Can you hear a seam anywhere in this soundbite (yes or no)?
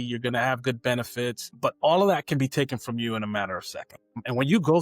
yes